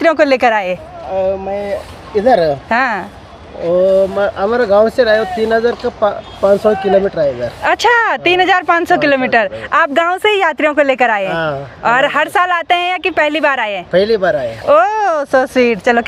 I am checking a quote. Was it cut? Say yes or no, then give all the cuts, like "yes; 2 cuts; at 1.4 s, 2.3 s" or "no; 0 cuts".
no; 0 cuts